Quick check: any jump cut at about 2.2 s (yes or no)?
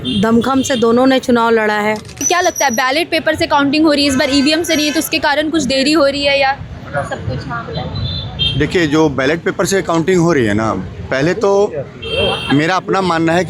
yes